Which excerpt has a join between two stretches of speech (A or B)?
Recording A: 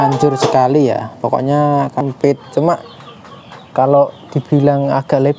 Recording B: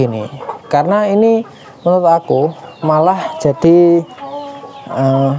A